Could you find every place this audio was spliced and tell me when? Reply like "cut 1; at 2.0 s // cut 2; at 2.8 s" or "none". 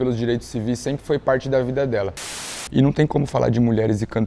cut 1; at 2.3 s